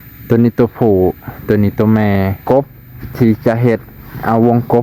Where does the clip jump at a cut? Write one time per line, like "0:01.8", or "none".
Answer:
0:02.4